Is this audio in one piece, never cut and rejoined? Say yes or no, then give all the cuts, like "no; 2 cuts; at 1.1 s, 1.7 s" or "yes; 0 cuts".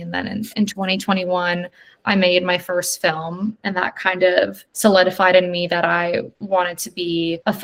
yes; 0 cuts